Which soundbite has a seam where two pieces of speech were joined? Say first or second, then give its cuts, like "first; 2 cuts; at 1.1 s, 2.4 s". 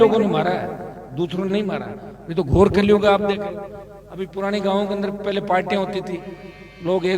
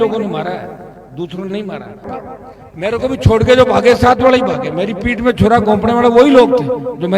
second; 1 cut; at 2.2 s